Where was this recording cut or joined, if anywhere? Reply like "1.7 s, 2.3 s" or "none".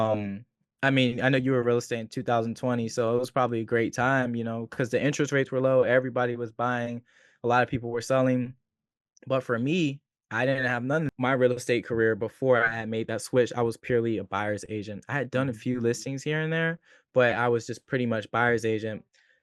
11.1 s